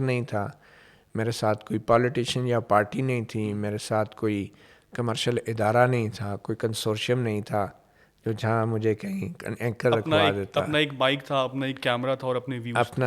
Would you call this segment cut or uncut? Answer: uncut